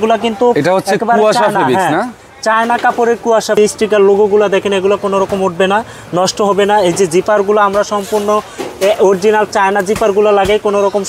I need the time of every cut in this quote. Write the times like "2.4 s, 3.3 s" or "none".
3.6 s